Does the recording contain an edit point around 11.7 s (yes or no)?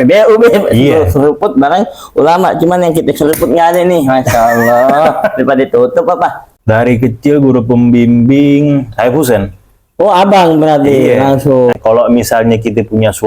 yes